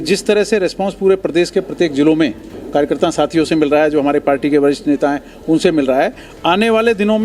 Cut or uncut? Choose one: uncut